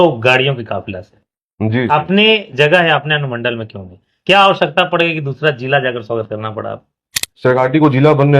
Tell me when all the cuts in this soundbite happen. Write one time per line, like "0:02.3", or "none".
0:07.5

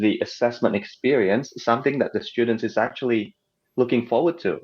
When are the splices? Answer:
none

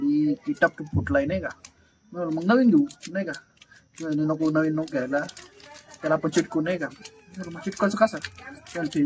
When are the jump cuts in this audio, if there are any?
none

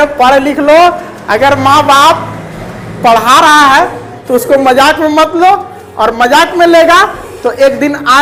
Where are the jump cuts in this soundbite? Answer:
none

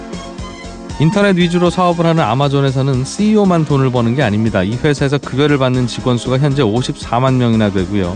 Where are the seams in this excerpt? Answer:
0:01.0

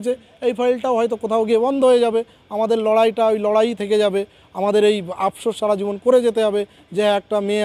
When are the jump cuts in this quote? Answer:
none

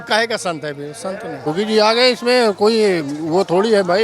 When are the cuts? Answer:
0:01.4

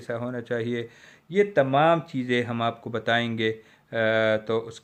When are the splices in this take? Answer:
none

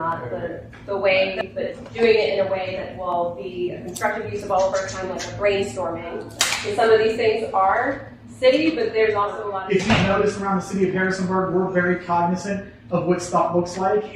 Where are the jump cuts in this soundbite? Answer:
0:01.4
0:06.3
0:09.5

